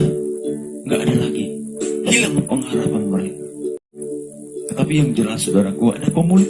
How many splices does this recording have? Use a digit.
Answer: 1